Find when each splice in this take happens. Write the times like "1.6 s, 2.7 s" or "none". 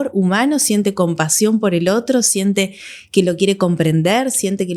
none